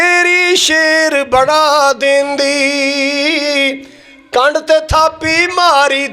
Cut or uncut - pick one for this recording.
uncut